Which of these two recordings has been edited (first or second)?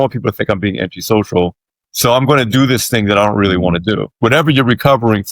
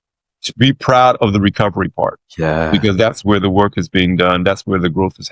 first